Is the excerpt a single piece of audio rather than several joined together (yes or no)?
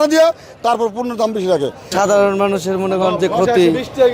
no